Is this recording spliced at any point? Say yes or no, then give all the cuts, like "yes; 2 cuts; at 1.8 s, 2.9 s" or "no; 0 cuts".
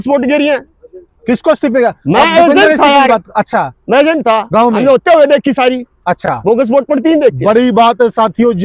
no; 0 cuts